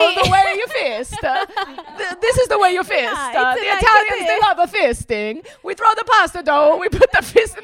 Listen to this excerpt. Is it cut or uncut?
uncut